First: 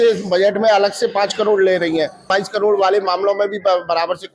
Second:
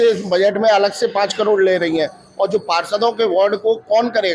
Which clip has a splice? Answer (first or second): first